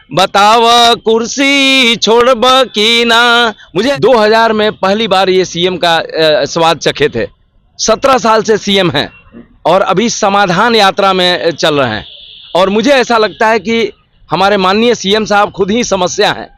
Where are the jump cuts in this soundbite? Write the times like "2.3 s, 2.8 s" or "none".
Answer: 3.9 s

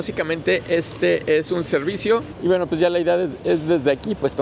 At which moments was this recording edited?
2.3 s

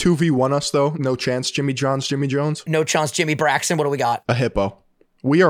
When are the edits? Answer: 1.0 s, 2.6 s, 4.2 s

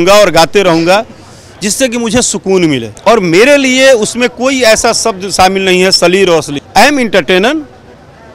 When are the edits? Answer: 2.9 s, 6.6 s

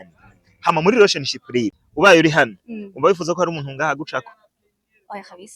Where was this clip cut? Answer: 1.8 s

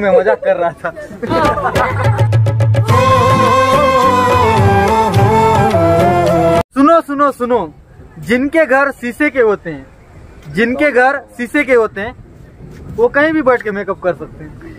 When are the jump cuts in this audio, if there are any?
none

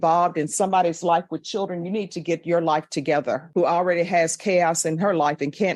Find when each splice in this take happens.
3.5 s

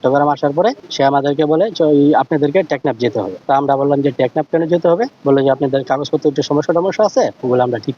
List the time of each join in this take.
0.8 s, 3.4 s, 5.1 s

